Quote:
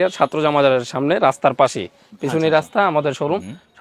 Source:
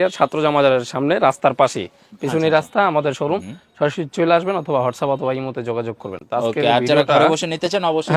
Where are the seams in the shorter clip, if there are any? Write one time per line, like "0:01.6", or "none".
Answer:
none